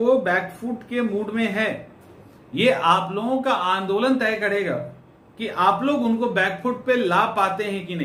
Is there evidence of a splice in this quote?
no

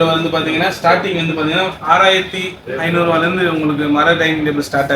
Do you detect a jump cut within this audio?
no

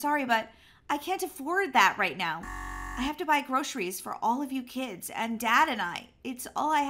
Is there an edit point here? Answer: no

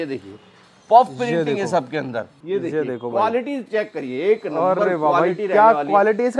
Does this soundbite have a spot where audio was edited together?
yes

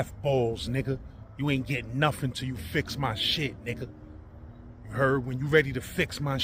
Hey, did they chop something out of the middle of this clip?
no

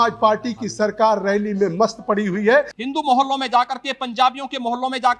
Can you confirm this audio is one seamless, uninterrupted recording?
no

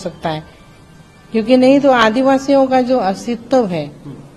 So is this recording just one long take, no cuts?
yes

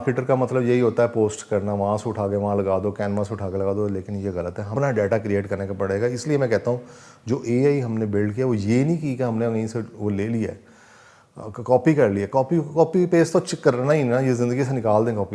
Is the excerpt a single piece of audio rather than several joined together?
no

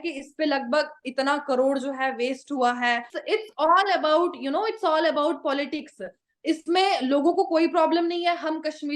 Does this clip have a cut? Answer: yes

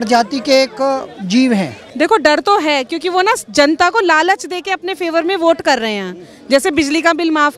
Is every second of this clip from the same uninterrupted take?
no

